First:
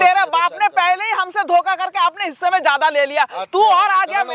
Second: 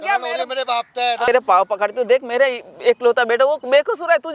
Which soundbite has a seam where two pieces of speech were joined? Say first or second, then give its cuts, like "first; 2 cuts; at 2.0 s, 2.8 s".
second; 1 cut; at 1.3 s